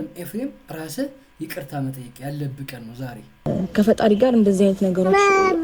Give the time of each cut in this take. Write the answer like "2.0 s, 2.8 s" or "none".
3.5 s